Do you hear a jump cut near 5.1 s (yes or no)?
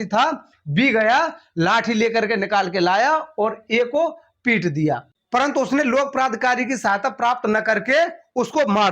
yes